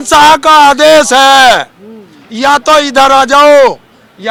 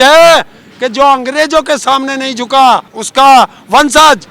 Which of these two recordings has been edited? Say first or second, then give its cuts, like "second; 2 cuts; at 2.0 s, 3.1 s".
second; 1 cut; at 3.0 s